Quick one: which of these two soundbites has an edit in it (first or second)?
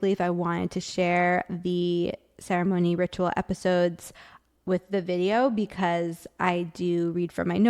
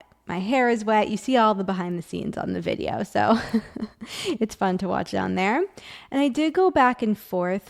first